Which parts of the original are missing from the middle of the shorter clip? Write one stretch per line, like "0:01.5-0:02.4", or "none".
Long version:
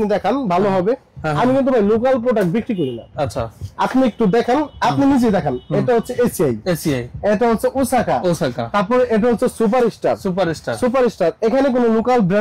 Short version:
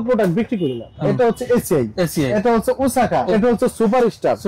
0:03.1-0:05.6
0:07.0-0:07.3
0:08.3-0:09.1